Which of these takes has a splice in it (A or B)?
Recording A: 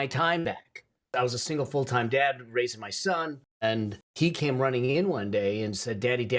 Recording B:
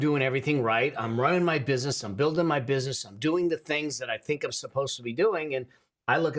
A